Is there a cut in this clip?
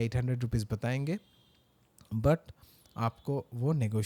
no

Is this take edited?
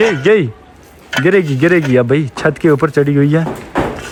no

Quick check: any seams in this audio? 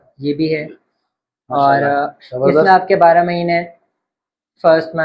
no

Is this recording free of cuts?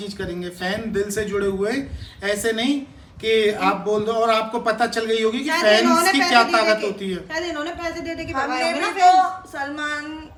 yes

